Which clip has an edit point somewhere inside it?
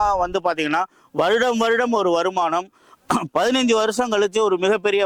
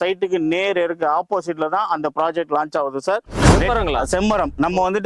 second; 1 cut; at 3.3 s

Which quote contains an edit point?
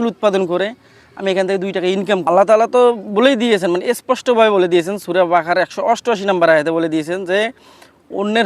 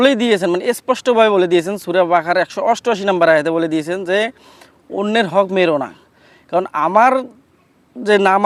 first; 1 cut; at 2.3 s

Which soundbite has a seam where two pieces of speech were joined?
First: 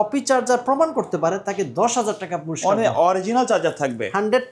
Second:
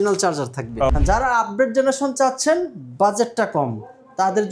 second; 1 cut; at 1.0 s

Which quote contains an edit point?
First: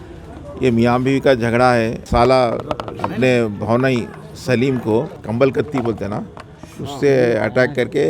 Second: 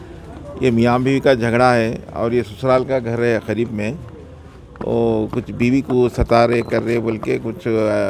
first; 3 cuts; at 2.1 s, 3.0 s, 5.2 s

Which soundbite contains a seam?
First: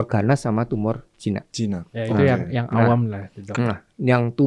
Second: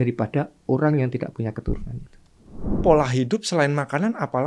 second; 1 cut; at 2.8 s

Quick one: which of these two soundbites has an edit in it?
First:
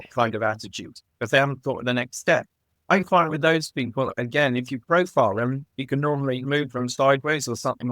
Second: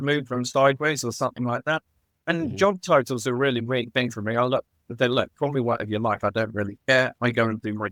first; 1 cut; at 2.7 s

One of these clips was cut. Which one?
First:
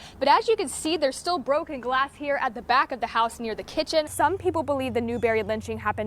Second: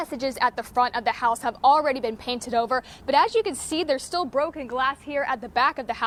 first; 1 cut; at 4.1 s

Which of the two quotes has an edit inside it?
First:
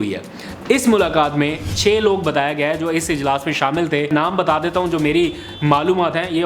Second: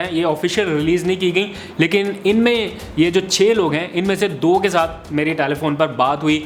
first; 2 cuts; at 1.7 s, 4.1 s

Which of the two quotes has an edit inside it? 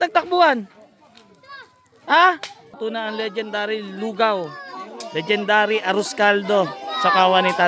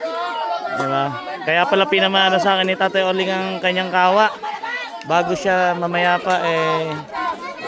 first; 1 cut; at 2.7 s

